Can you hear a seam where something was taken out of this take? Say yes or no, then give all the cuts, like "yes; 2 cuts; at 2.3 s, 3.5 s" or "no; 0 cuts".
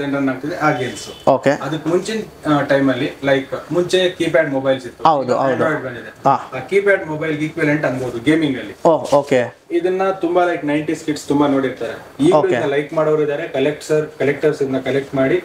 no; 0 cuts